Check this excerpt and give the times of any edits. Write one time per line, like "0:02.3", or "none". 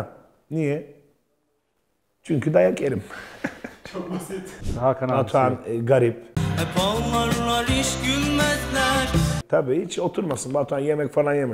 0:04.6